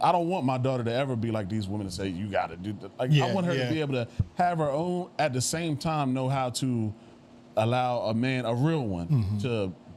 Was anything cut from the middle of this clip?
no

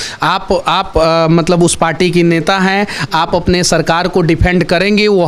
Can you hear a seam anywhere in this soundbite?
no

